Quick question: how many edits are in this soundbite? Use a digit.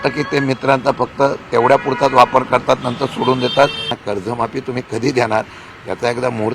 1